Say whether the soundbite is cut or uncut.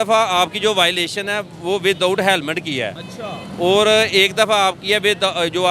uncut